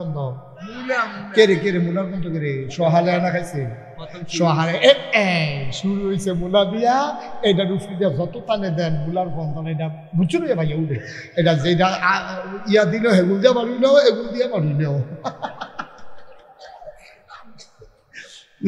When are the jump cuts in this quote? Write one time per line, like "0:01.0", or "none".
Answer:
none